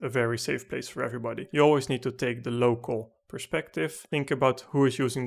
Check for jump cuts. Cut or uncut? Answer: cut